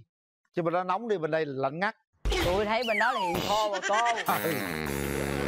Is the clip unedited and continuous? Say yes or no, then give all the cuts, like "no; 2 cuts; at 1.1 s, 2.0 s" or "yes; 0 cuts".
yes; 0 cuts